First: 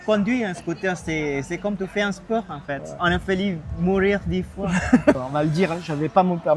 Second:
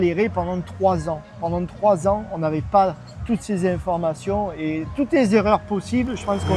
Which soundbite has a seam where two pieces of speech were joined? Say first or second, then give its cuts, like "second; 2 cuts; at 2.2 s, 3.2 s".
first; 1 cut; at 5.2 s